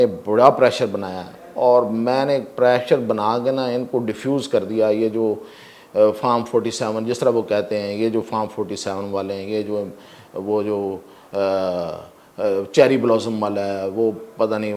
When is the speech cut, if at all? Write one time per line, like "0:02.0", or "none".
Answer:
none